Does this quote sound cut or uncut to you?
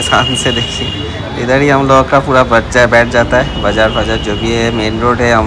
uncut